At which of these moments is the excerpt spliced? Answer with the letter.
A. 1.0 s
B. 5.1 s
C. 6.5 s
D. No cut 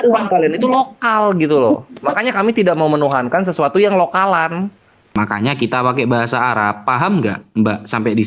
B